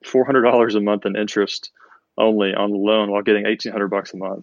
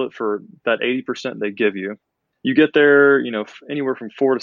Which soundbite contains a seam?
second; 1 cut; at 2.2 s

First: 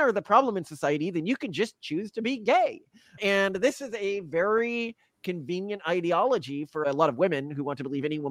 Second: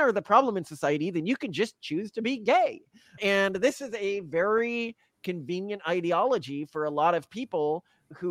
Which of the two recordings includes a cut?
first; 1 cut; at 6.8 s

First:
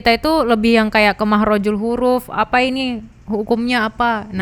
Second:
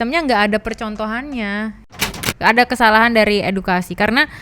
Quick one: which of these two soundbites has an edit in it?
second; 1 cut; at 2.0 s

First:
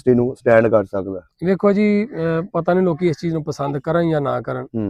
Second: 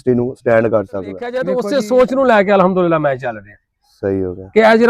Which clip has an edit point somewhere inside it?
second; 1 cut; at 1.4 s

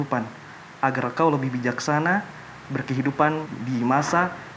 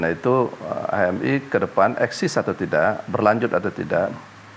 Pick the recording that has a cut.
first; 1 cut; at 3.5 s

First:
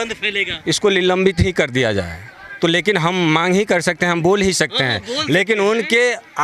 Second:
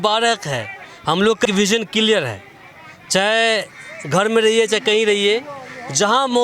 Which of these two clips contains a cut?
second; 1 cut; at 1.5 s

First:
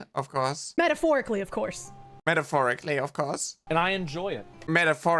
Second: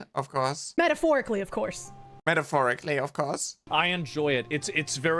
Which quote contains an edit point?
second; 1 cut; at 3.5 s

